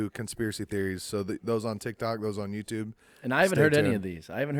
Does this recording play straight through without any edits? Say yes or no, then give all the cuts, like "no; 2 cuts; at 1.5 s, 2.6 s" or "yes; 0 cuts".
yes; 0 cuts